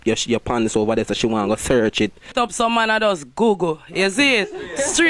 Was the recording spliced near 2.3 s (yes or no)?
yes